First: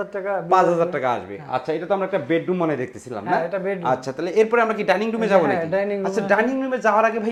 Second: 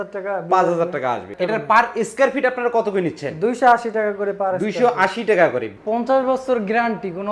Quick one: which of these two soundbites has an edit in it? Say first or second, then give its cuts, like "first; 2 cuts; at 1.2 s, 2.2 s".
second; 2 cuts; at 1.3 s, 5.7 s